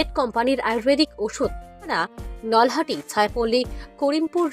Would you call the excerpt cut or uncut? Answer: cut